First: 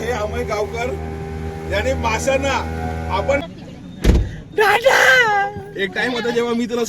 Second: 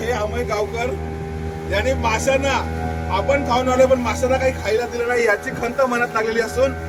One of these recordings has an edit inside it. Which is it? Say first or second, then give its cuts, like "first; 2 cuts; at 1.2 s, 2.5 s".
first; 1 cut; at 3.4 s